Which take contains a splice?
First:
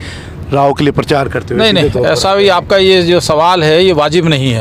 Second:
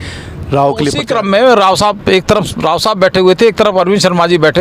second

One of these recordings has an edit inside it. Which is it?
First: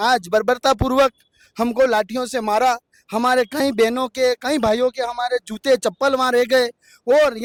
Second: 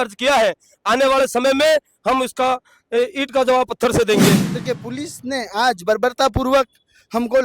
second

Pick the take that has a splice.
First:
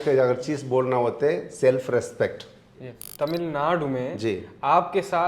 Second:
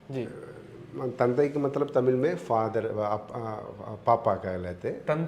first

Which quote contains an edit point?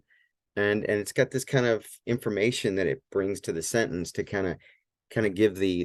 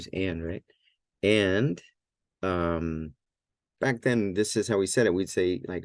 second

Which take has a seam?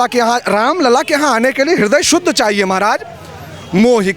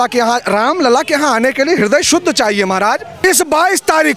second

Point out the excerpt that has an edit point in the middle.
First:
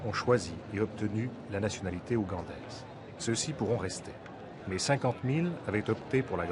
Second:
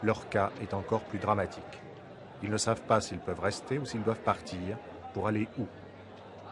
first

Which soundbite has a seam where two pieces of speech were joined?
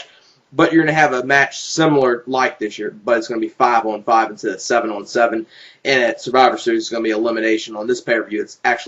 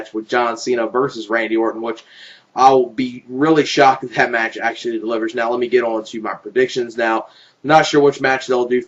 first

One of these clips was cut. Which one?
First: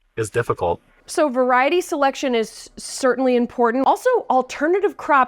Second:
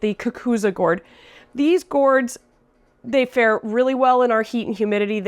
first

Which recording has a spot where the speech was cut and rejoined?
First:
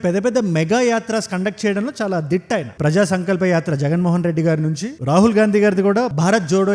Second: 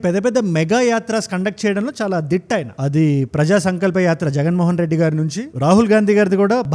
first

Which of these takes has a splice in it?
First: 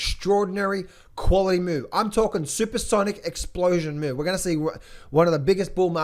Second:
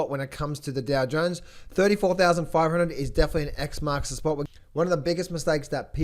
second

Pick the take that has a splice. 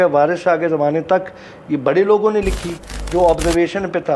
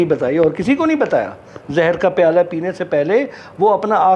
first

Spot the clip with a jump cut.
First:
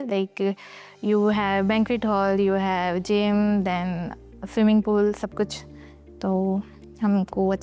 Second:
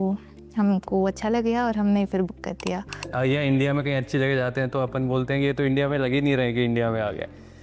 second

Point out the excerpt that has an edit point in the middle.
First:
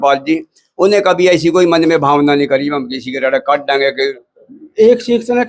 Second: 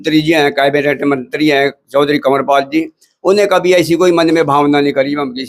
first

